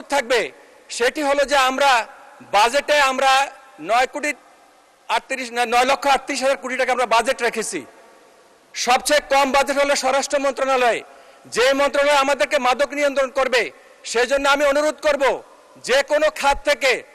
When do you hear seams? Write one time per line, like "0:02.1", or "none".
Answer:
none